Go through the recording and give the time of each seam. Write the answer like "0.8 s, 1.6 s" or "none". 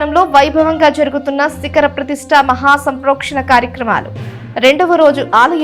none

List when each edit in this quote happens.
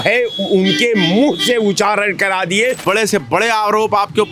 2.8 s

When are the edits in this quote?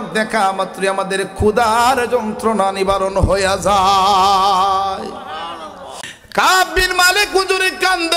6.1 s

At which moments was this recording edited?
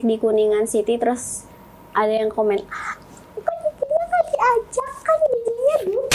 none

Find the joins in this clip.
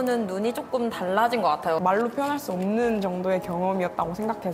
1.8 s

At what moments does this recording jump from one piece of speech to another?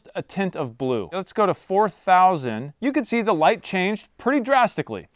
1.2 s

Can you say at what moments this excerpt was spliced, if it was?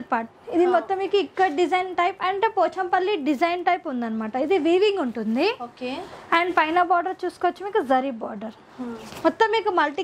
none

